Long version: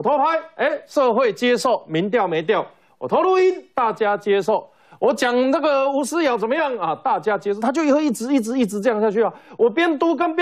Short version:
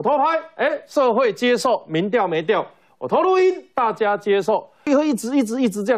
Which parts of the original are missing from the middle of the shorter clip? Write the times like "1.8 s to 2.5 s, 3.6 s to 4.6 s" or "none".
4.9 s to 7.8 s